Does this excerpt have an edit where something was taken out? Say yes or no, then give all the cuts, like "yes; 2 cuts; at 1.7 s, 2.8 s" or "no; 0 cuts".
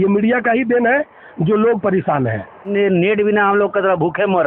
no; 0 cuts